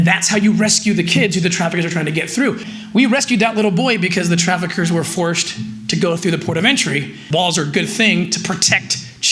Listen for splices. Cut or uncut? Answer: cut